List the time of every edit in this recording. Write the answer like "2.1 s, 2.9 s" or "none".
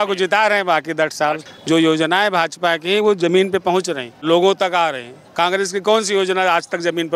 1.4 s, 4.1 s